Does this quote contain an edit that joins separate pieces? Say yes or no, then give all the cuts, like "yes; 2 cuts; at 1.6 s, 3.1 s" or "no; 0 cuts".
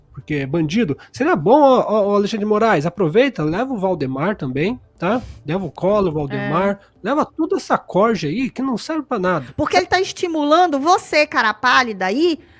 yes; 1 cut; at 9.5 s